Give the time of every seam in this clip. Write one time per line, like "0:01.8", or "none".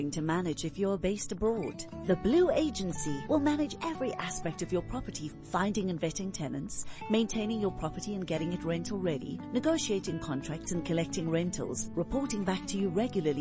none